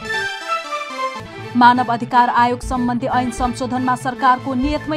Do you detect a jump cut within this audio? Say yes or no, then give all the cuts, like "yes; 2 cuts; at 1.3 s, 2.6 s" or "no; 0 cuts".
yes; 1 cut; at 1.0 s